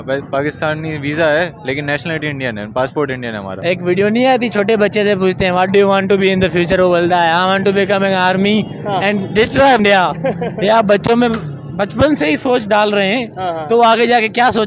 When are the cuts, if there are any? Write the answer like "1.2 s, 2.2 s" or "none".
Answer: 3.5 s, 9.8 s